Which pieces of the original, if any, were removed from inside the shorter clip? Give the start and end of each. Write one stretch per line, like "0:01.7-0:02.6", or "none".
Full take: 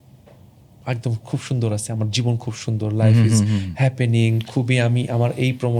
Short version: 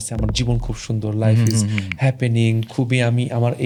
none